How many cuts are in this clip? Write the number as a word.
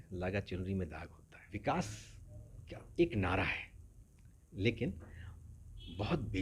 one